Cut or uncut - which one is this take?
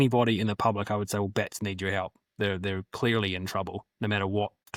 uncut